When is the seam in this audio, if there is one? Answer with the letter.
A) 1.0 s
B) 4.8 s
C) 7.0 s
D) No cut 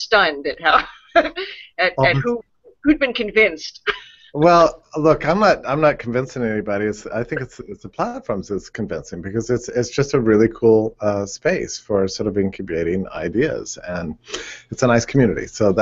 C